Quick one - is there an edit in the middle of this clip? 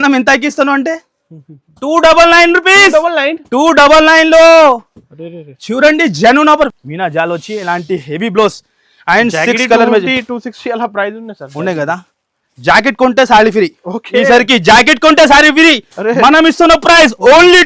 yes; 1 cut; at 6.7 s

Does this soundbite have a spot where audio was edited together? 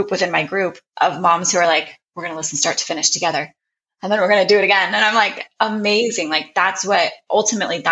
no; 0 cuts

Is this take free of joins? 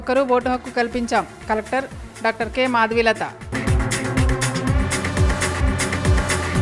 yes; 0 cuts

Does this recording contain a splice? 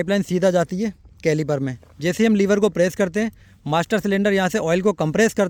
no; 0 cuts

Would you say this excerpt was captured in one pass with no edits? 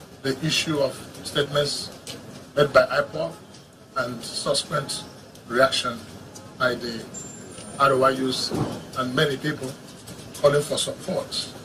yes; 0 cuts

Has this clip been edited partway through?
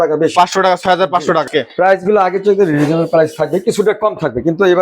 yes; 1 cut; at 1.5 s

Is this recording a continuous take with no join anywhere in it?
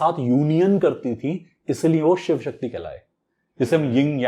yes; 0 cuts

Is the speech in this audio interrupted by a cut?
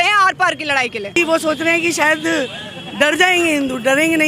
yes; 1 cut; at 1.2 s

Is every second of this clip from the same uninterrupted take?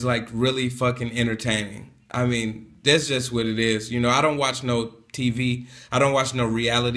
yes; 0 cuts

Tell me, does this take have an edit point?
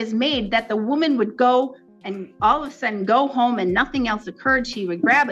no; 0 cuts

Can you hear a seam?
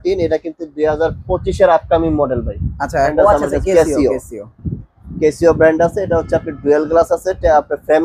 yes; 1 cut; at 3.1 s

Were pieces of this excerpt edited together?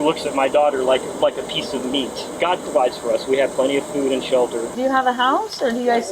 yes; 2 cuts; at 2.2 s, 4.7 s

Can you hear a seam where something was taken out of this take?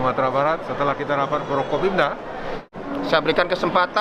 yes; 1 cut; at 2.6 s

